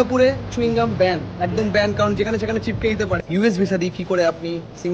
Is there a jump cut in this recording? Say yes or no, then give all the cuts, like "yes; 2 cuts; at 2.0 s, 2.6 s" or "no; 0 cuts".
yes; 1 cut; at 3.2 s